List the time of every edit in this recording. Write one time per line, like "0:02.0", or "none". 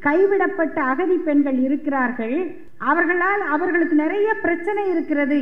0:02.6